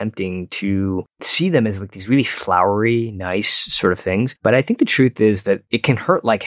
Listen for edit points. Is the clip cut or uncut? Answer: cut